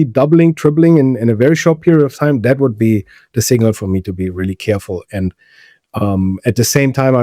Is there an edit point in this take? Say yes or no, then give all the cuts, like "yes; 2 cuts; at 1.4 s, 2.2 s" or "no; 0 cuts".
no; 0 cuts